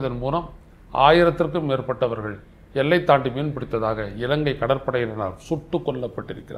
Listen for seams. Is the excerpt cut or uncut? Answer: uncut